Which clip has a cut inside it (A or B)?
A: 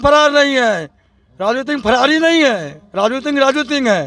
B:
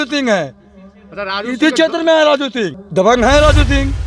B